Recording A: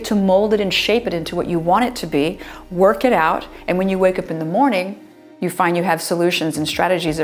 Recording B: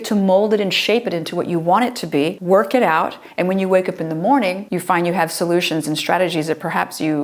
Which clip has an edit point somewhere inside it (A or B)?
B